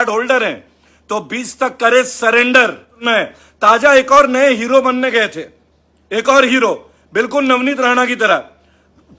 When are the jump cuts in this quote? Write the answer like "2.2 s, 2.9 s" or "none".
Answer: 2.9 s